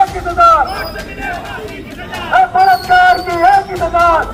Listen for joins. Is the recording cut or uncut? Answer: uncut